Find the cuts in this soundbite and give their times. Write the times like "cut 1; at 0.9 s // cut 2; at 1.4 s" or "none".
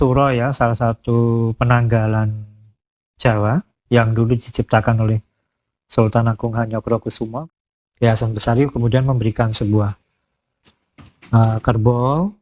cut 1; at 7.3 s